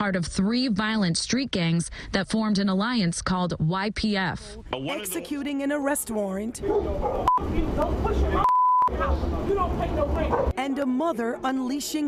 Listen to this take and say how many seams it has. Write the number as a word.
one